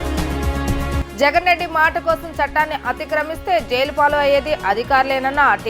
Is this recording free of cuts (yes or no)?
no